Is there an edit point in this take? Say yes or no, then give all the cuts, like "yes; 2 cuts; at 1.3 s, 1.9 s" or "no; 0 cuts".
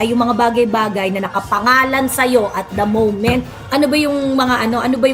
no; 0 cuts